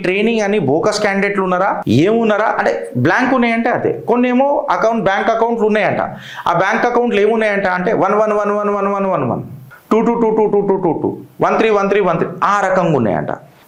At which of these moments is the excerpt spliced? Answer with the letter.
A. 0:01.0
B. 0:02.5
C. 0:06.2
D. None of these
D